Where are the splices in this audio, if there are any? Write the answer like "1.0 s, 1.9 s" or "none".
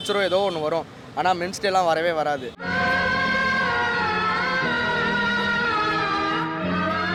none